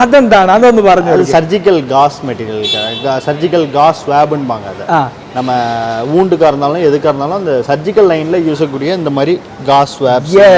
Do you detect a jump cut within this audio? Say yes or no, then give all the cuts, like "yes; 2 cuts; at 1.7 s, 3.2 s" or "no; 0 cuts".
no; 0 cuts